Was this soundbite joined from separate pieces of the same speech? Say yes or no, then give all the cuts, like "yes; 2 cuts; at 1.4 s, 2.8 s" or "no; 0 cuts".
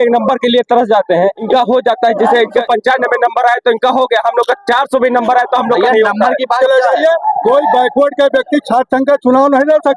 yes; 3 cuts; at 1.4 s, 2.6 s, 6.6 s